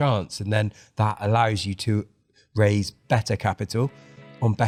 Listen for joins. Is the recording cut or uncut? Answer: uncut